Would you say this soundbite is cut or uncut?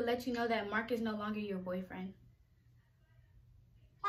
uncut